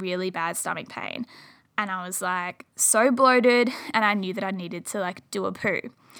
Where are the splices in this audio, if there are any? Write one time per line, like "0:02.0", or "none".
none